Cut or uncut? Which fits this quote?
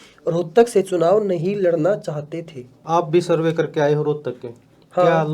cut